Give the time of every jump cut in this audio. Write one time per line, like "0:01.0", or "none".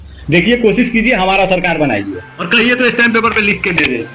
none